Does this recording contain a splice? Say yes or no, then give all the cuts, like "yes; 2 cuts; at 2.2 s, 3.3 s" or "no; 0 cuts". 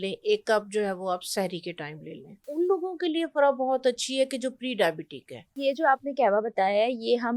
yes; 2 cuts; at 2.5 s, 5.6 s